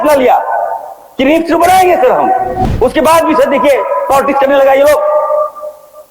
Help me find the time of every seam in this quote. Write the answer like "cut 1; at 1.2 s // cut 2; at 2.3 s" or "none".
cut 1; at 2.6 s